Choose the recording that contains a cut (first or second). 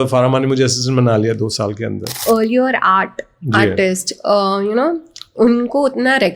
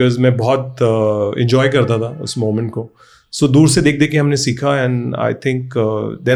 first